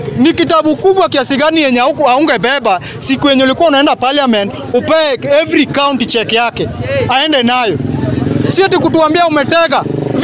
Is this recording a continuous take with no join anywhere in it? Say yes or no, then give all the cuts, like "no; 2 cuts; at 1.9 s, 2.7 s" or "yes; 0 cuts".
yes; 0 cuts